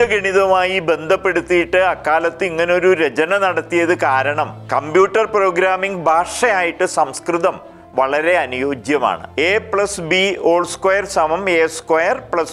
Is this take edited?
yes; 2 cuts; at 4.6 s, 9.2 s

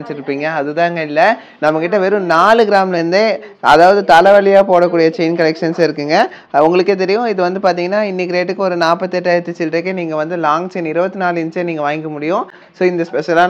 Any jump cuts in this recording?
no; 0 cuts

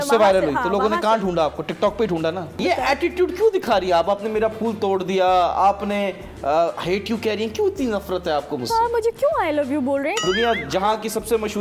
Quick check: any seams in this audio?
yes; 2 cuts; at 2.6 s, 10.2 s

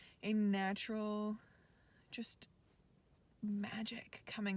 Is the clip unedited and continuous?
yes; 0 cuts

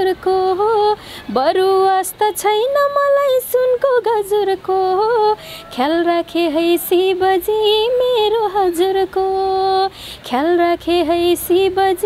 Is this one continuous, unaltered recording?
yes; 0 cuts

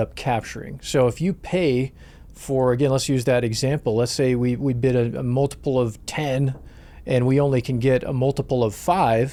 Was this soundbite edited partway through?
no; 0 cuts

